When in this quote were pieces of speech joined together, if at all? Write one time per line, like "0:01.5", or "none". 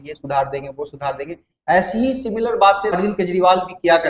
0:03.0